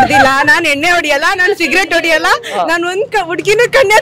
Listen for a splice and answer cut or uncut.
uncut